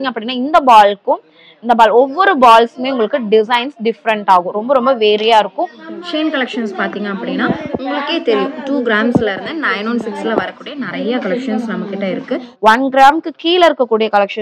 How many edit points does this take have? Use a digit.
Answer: 2